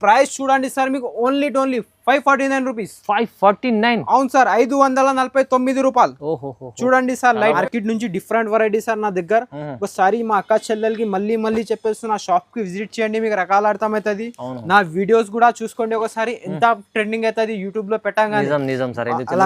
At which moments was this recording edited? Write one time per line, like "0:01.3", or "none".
0:07.6